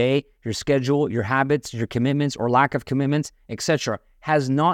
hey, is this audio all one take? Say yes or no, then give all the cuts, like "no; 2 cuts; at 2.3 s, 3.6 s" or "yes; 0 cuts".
yes; 0 cuts